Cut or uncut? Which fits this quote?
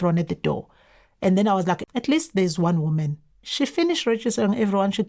cut